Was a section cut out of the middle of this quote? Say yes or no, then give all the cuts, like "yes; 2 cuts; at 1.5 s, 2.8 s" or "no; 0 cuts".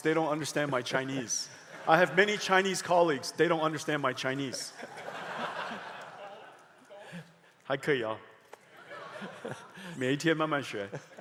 no; 0 cuts